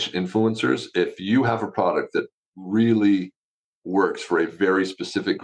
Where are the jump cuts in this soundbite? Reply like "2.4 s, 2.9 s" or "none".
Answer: none